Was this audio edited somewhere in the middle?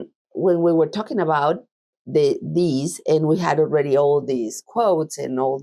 no; 0 cuts

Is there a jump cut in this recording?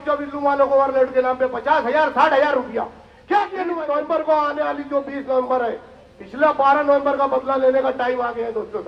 yes; 1 cut; at 3.8 s

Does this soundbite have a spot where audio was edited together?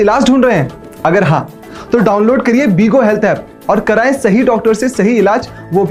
no; 0 cuts

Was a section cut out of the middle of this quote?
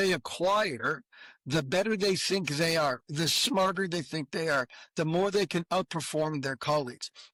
no; 0 cuts

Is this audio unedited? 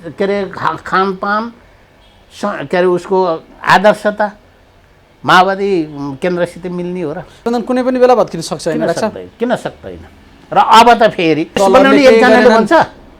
no; 2 cuts; at 7.4 s, 11.6 s

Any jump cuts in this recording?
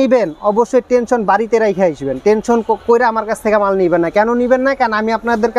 no; 0 cuts

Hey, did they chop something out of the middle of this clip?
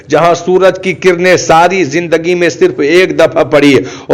no; 0 cuts

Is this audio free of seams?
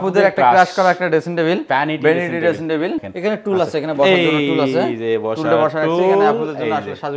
no; 1 cut; at 3.1 s

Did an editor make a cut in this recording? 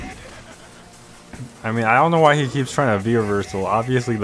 no; 0 cuts

